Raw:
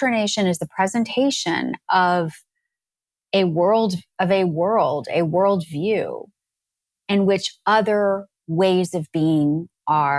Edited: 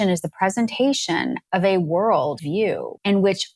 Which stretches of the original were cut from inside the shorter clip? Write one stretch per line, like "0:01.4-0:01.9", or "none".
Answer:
0:01.8-0:04.1
0:05.1-0:06.4